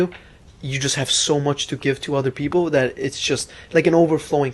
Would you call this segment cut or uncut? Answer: uncut